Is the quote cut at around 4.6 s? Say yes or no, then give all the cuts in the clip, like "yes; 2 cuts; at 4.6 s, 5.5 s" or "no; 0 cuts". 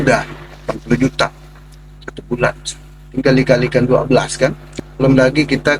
yes; 1 cut; at 4.6 s